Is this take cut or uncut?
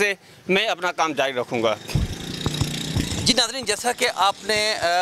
uncut